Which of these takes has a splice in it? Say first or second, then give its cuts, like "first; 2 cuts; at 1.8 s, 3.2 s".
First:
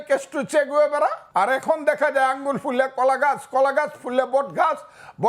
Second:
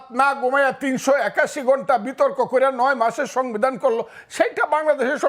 first; 1 cut; at 1.2 s